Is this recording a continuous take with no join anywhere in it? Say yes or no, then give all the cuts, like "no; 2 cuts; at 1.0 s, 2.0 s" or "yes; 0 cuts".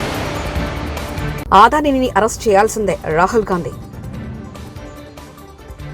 no; 1 cut; at 1.4 s